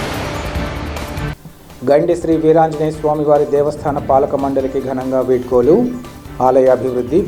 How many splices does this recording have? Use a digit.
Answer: 1